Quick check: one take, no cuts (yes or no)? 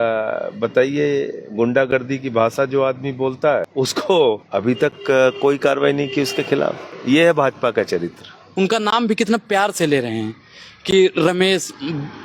no